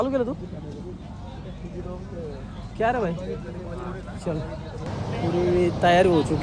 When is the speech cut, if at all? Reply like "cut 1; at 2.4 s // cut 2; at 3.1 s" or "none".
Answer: cut 1; at 4.8 s